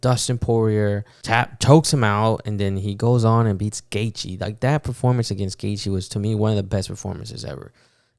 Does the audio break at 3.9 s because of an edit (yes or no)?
no